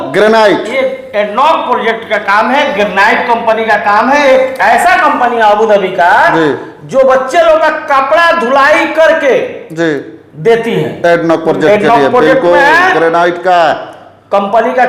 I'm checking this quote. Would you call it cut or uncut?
uncut